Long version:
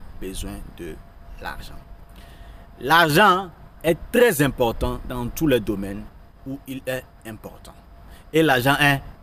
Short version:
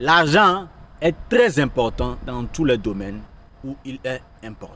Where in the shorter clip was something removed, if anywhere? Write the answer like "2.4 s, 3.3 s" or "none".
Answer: none